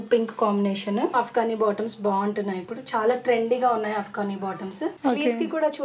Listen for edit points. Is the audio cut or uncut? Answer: cut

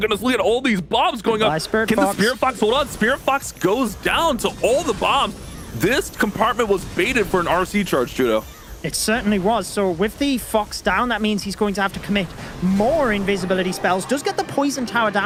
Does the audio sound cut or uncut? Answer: uncut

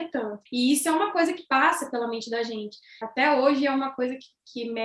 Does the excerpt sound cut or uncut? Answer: cut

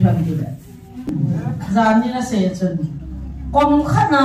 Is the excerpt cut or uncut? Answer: cut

